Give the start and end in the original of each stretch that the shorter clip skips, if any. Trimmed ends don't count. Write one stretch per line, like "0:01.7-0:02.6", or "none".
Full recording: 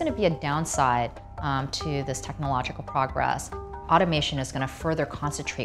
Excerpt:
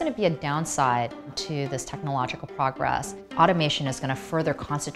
0:01.4-0:01.7
0:03.5-0:03.7